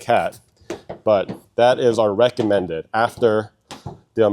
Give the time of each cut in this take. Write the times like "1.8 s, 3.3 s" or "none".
1.4 s